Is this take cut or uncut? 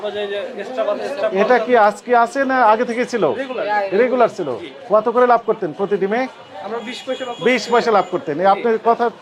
uncut